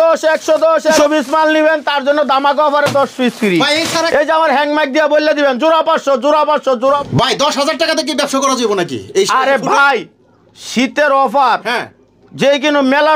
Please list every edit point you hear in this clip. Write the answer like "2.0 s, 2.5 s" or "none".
1.0 s, 3.8 s, 7.0 s